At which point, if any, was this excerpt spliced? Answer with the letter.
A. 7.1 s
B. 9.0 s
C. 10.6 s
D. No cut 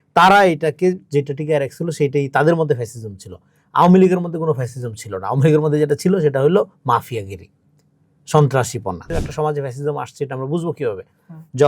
B